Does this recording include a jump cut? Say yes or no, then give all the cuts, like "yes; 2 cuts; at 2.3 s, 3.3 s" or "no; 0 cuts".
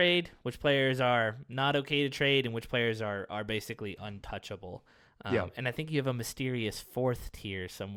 no; 0 cuts